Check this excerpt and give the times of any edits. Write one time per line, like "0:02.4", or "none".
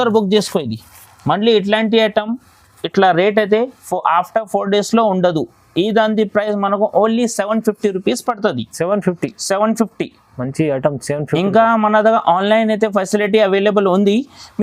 none